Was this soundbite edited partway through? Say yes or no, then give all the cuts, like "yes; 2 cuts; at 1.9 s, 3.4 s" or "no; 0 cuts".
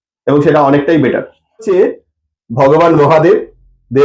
yes; 1 cut; at 1.7 s